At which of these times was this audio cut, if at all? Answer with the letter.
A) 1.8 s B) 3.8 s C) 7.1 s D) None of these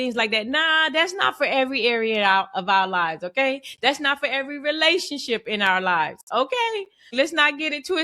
C